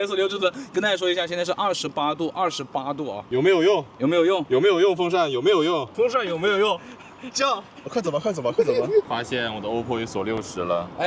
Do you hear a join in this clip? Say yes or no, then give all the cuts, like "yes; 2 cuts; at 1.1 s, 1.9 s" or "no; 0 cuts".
yes; 3 cuts; at 3.2 s, 5.9 s, 9.1 s